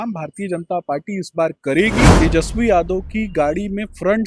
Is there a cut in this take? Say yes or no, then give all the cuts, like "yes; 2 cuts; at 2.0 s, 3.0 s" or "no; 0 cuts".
yes; 1 cut; at 2.1 s